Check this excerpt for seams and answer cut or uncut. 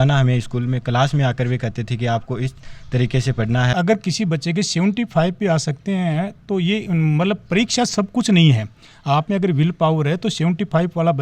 cut